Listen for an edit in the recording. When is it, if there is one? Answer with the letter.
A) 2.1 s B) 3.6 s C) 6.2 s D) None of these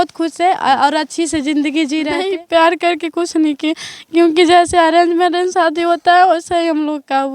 A